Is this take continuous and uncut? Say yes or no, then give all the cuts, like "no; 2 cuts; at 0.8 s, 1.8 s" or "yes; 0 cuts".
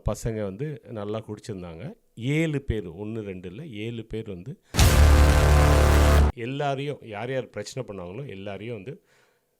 no; 2 cuts; at 4.6 s, 6.4 s